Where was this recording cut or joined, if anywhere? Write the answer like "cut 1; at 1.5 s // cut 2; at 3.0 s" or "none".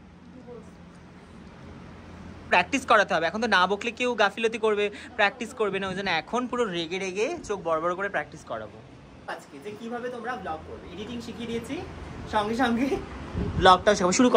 cut 1; at 2.5 s // cut 2; at 9.3 s